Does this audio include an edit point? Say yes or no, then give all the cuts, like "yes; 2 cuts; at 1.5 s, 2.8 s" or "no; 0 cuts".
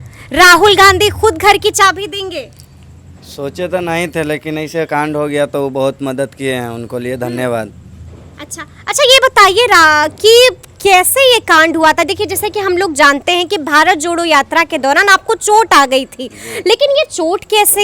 no; 0 cuts